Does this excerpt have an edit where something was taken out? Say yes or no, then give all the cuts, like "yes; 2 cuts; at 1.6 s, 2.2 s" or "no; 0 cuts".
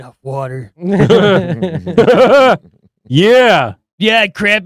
no; 0 cuts